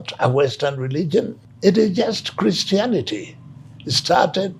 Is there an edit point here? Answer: yes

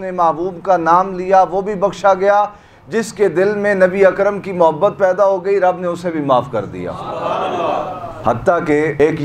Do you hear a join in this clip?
no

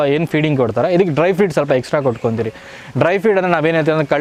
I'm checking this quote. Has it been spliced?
no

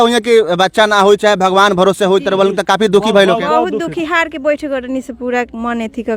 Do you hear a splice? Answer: no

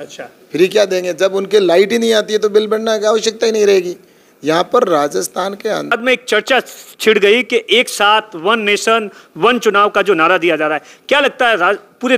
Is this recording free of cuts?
no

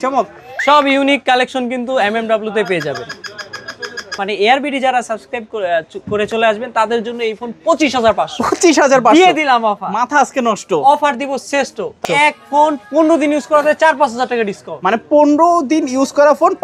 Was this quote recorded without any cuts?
no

